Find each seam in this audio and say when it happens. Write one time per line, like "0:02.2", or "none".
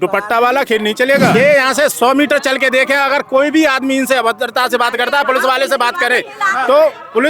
0:01.3